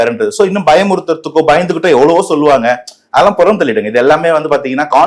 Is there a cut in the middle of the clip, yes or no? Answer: no